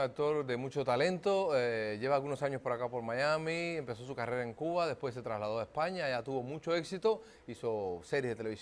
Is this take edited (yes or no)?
yes